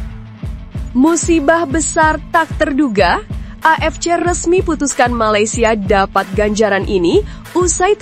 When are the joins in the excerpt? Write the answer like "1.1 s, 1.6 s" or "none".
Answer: 0.9 s